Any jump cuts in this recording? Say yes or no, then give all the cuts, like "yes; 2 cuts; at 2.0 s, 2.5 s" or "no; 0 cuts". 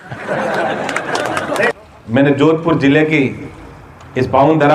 yes; 1 cut; at 1.7 s